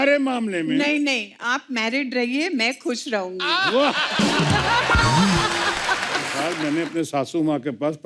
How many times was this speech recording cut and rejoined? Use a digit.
1